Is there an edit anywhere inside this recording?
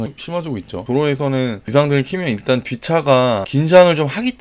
yes; 2 cuts; at 0.8 s, 3.5 s

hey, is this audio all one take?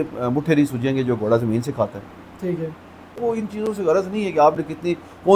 no; 1 cut; at 3.2 s

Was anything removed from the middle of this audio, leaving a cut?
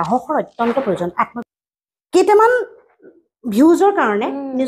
yes; 1 cut; at 1.3 s

